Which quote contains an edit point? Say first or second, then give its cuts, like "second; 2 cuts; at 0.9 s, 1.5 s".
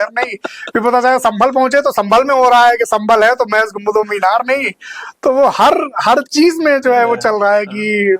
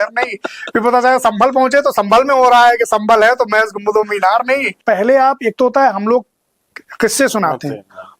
second; 1 cut; at 4.8 s